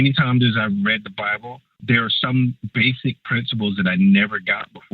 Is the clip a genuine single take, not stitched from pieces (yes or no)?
no